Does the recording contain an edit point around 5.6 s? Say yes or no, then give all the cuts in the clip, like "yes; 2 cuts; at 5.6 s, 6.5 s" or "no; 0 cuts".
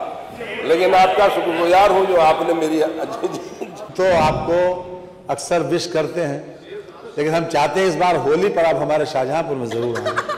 no; 1 cut; at 3.9 s